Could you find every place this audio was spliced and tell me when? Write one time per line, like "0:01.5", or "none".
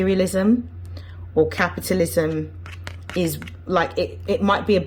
none